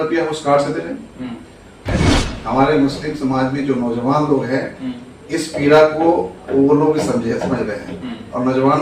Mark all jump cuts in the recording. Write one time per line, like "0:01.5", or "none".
0:01.9